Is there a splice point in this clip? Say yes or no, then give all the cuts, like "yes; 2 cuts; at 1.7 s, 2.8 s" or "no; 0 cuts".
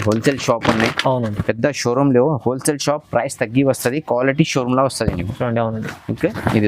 no; 0 cuts